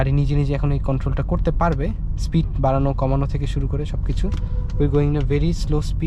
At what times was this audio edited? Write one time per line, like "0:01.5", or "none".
none